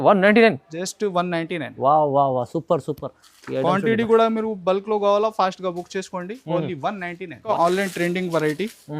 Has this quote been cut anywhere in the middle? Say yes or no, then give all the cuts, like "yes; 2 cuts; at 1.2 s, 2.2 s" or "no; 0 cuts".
yes; 1 cut; at 7.5 s